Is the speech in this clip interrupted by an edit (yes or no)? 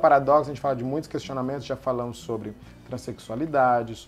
no